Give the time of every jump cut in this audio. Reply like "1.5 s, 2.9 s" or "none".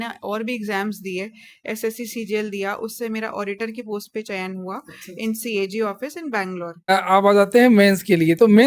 6.9 s